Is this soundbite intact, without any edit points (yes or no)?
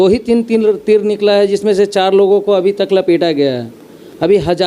yes